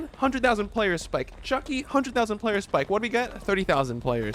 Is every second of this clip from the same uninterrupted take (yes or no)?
yes